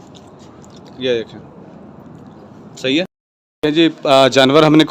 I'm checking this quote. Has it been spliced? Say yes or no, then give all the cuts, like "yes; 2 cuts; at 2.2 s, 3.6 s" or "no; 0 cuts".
yes; 1 cut; at 3.6 s